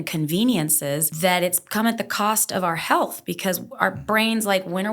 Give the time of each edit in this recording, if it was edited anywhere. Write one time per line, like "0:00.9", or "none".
0:01.1